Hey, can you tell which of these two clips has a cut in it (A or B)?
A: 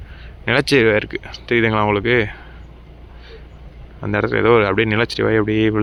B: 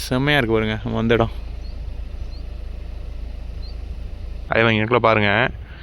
B